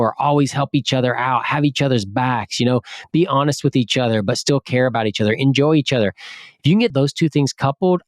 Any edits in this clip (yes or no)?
yes